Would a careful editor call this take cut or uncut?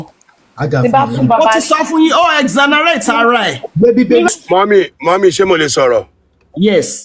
cut